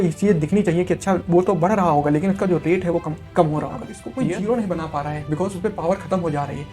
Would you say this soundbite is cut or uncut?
cut